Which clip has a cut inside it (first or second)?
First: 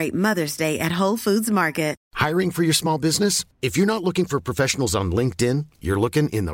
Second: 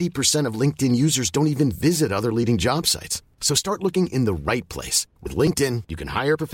first